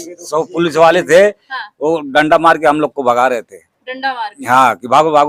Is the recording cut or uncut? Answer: uncut